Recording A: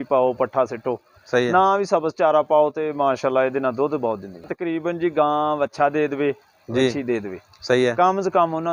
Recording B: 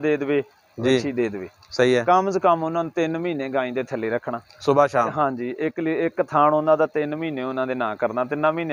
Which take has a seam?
A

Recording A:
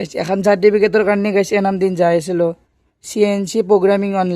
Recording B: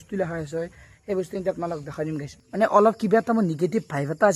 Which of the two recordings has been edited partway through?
B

